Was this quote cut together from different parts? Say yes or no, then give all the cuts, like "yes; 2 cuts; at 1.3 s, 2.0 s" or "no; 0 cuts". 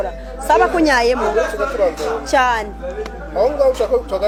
no; 0 cuts